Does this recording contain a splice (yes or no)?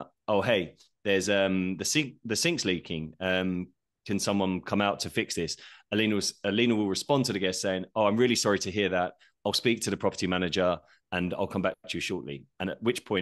no